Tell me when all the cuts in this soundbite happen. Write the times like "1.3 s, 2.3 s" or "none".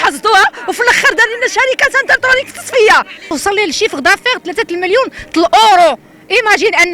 3.3 s